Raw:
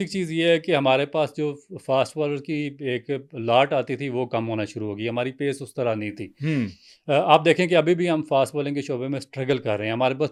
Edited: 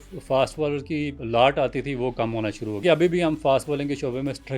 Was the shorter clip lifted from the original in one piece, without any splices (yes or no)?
no